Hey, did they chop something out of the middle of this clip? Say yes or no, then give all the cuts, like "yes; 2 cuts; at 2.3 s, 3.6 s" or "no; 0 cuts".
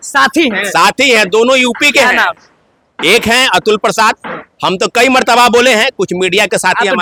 no; 0 cuts